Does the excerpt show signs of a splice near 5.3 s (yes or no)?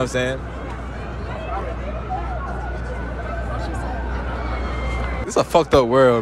yes